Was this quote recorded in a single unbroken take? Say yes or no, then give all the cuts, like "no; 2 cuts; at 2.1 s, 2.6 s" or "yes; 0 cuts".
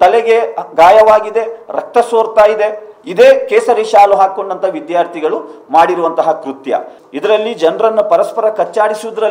no; 1 cut; at 7.0 s